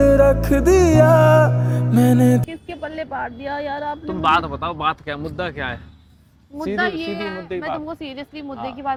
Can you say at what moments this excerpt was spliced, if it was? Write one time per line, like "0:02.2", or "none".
none